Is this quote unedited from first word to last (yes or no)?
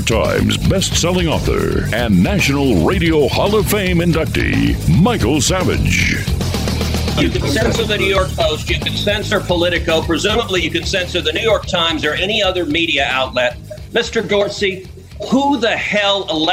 no